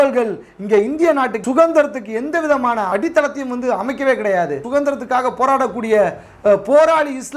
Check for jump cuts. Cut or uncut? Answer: cut